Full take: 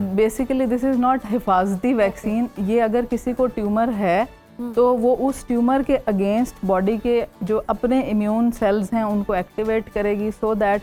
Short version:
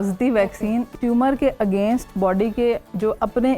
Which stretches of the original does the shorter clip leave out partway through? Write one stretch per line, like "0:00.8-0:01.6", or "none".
0:02.6-0:05.4